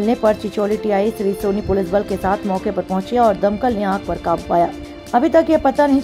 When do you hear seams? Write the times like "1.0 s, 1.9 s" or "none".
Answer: none

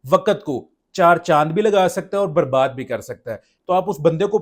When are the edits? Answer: 3.5 s

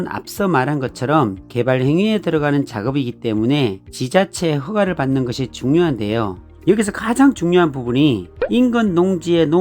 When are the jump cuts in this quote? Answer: 6.4 s

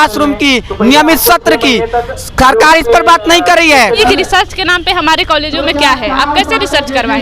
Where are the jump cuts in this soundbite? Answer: 4.0 s

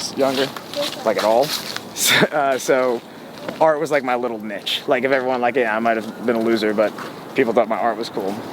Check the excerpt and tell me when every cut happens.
none

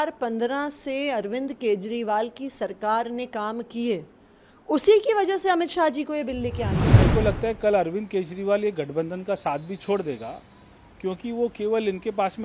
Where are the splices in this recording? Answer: 7.0 s

